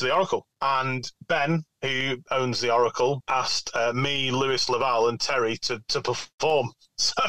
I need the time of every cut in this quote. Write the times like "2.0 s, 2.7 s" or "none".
0.7 s, 2.3 s, 3.2 s

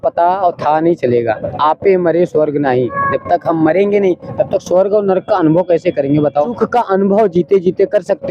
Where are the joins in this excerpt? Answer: 6.6 s

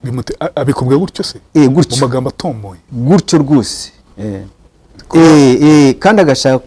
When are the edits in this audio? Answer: 4.9 s

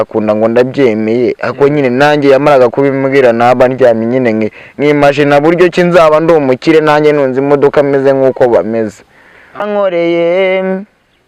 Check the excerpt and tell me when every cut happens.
9.6 s

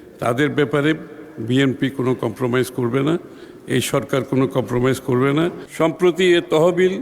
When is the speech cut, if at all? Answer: 5.6 s

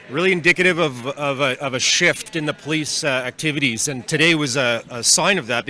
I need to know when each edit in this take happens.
2.3 s

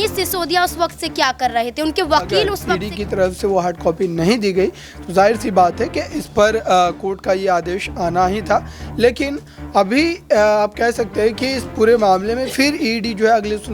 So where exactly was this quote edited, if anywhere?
2.7 s

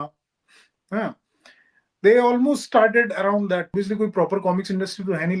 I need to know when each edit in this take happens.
3.7 s

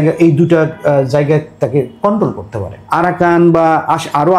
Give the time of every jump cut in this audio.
2.8 s

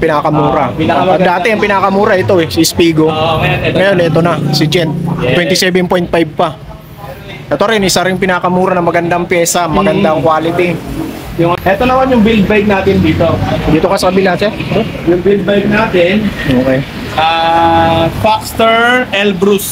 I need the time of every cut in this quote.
11.5 s

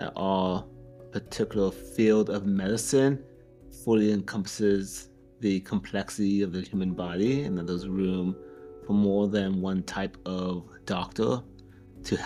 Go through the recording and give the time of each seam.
none

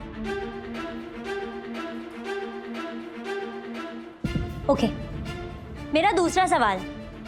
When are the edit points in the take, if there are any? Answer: none

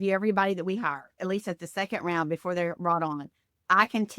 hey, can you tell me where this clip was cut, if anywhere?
1.1 s

